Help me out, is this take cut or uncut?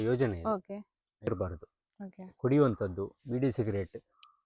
cut